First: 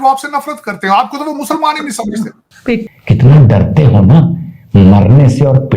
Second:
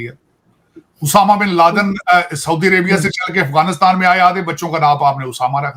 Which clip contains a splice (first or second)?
first